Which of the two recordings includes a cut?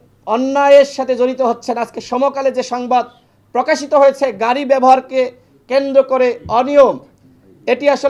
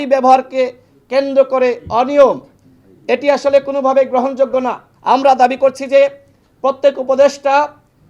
second; 1 cut; at 4.9 s

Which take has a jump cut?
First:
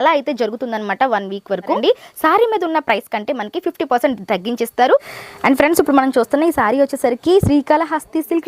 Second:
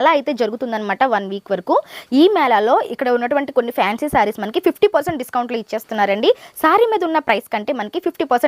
first; 2 cuts; at 1.8 s, 5.1 s

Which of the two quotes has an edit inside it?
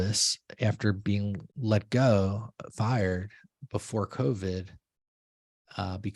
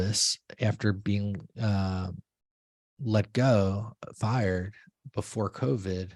first; 1 cut; at 1.5 s

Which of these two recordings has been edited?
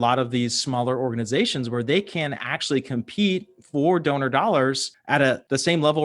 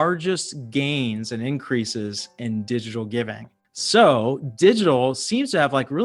first; 1 cut; at 4.9 s

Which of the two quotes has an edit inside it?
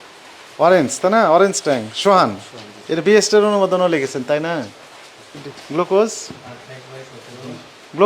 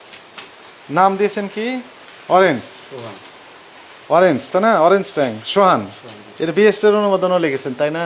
first; 1 cut; at 5.5 s

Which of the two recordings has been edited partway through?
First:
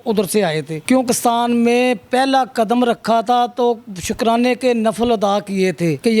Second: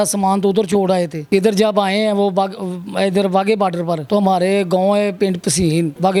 first; 1 cut; at 1.0 s

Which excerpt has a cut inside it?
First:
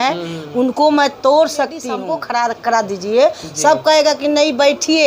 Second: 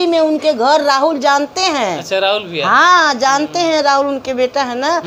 first; 1 cut; at 2.0 s

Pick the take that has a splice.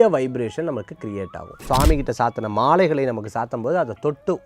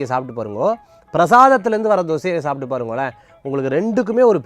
first; 1 cut; at 1.6 s

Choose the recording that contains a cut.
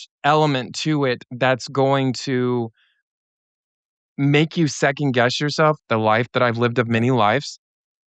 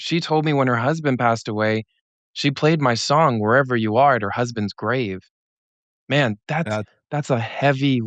first; 1 cut; at 5.8 s

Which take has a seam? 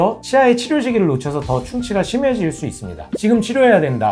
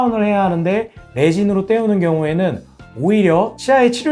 first; 1 cut; at 3.1 s

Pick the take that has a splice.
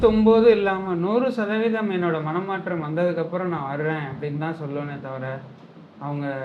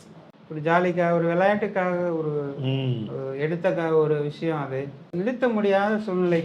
second; 1 cut; at 5.2 s

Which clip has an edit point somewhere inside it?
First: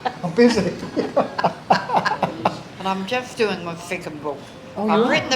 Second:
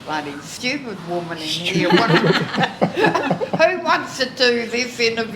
first; 1 cut; at 2.7 s

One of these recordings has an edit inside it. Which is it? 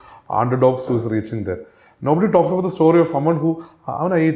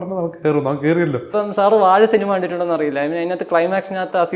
second; 1 cut; at 1.3 s

